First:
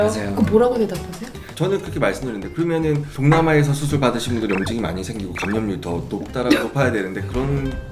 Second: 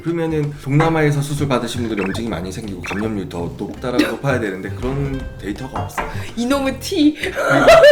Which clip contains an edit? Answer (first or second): first